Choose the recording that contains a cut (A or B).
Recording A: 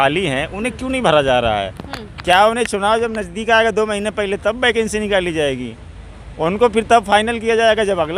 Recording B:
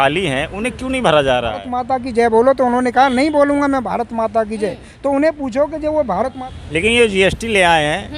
B